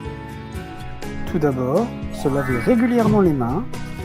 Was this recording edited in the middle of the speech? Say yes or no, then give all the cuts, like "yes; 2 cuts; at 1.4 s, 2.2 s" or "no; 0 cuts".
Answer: yes; 1 cut; at 1.3 s